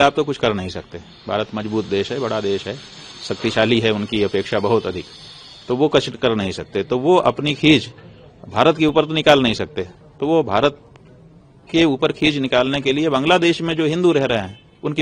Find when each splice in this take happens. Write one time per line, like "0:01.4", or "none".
none